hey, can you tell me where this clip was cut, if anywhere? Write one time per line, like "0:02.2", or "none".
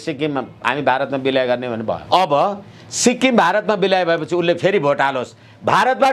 0:02.0

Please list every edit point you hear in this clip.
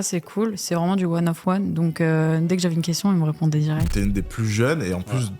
0:03.9

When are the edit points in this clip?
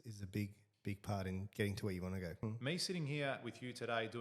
0:02.4

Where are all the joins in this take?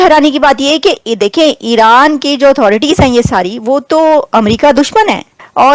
none

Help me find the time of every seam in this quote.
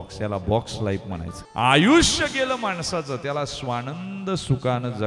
0:01.4

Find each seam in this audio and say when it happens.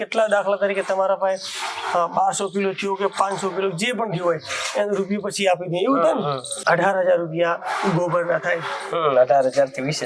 0:06.5

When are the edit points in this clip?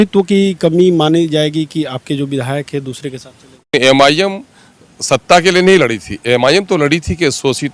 0:03.7

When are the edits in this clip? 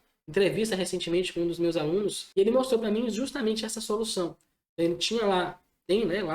0:02.2

